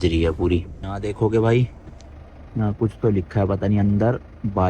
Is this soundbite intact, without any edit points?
no; 1 cut; at 1.1 s

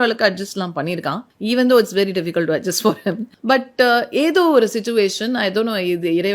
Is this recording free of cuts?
no; 2 cuts; at 1.3 s, 3.3 s

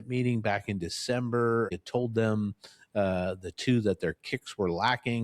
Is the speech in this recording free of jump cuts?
no; 1 cut; at 1.7 s

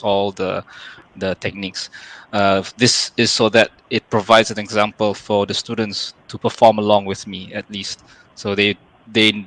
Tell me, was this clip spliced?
no; 0 cuts

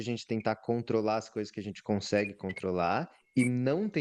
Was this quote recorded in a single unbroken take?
yes; 0 cuts

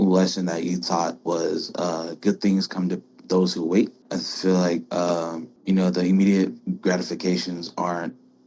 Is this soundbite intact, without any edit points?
no; 2 cuts; at 4.0 s, 5.5 s

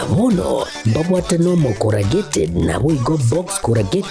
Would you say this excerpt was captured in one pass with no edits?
no; 1 cut; at 1.6 s

